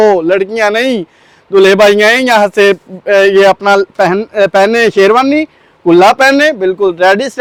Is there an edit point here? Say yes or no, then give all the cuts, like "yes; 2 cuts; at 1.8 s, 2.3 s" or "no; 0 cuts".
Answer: no; 0 cuts